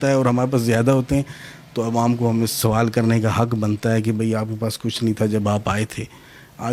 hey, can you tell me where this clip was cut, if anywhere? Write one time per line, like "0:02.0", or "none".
none